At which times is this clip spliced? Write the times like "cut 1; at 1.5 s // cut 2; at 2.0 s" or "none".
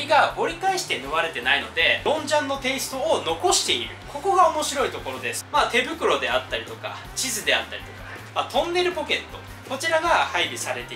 cut 1; at 2.0 s // cut 2; at 5.4 s // cut 3; at 8.2 s

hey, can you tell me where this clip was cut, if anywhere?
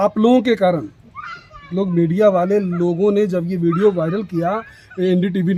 none

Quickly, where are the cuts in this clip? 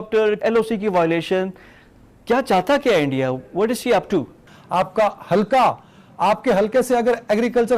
cut 1; at 4.6 s

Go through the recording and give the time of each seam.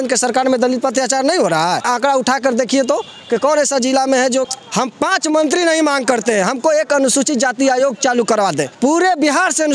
cut 1; at 1.8 s // cut 2; at 4.5 s // cut 3; at 8.7 s

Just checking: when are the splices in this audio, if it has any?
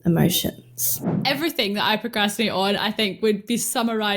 cut 1; at 1.1 s

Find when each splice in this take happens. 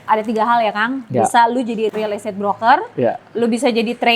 cut 1; at 1.9 s

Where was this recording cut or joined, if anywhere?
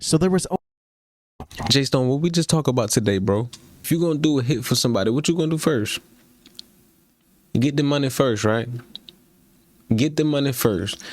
cut 1; at 3.8 s

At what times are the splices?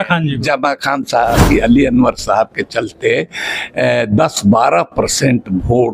cut 1; at 1.4 s

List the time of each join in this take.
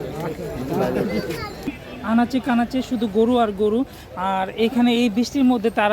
cut 1; at 1.8 s

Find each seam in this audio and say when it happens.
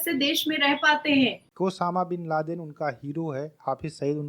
cut 1; at 1.4 s

